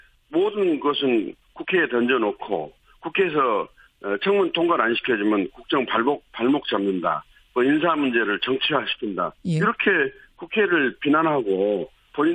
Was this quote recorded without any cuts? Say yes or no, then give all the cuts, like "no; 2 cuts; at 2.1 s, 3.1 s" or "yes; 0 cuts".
yes; 0 cuts